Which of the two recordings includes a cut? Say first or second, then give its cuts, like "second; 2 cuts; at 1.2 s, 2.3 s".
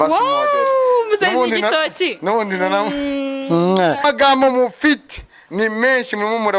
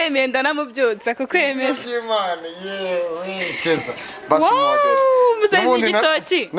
first; 1 cut; at 4.0 s